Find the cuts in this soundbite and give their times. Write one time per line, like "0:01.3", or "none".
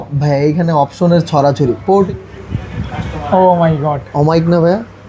0:02.1